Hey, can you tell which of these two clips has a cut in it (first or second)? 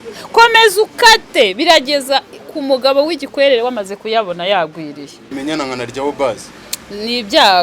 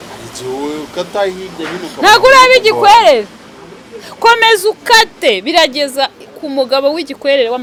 first